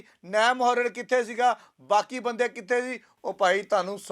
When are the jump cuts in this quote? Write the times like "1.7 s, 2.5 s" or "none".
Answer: 3.1 s

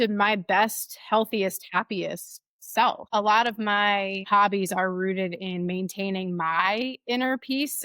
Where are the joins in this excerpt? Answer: 3.0 s, 4.2 s

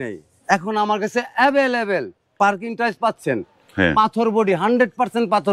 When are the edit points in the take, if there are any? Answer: none

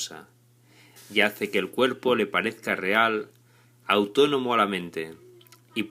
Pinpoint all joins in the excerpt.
1.7 s

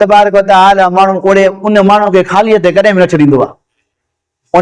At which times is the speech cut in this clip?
none

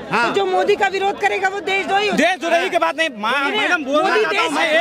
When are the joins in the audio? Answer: none

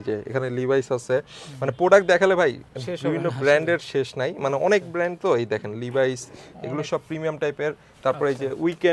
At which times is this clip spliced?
none

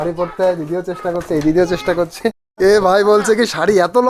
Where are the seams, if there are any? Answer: 2.4 s

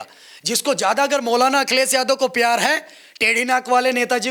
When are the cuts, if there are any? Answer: none

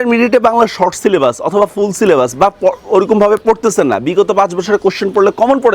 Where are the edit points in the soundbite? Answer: none

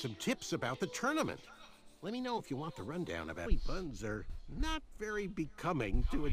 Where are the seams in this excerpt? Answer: none

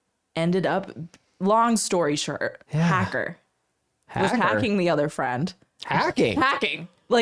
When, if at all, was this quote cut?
1.2 s

